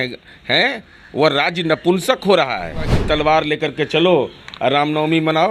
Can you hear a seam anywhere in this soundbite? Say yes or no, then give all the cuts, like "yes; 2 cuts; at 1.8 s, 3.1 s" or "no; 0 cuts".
yes; 1 cut; at 3.0 s